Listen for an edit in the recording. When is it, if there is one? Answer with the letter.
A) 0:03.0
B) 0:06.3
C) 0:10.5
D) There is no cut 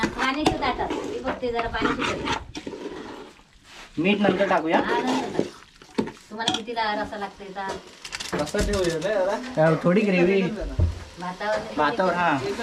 D